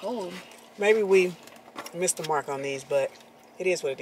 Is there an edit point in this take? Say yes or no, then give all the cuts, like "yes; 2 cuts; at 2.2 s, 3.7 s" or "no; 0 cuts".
no; 0 cuts